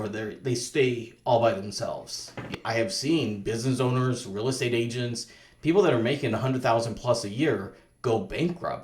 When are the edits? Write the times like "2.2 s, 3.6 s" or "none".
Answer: 2.5 s